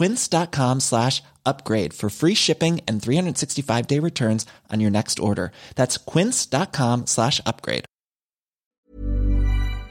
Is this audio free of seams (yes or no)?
no